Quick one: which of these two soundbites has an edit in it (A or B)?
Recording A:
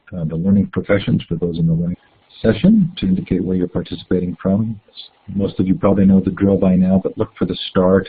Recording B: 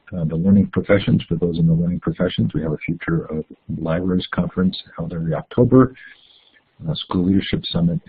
B